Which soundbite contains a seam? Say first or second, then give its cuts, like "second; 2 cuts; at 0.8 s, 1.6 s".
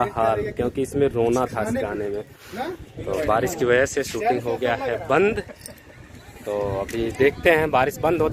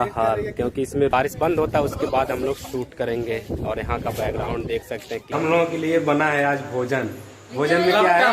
second; 2 cuts; at 1.1 s, 5.3 s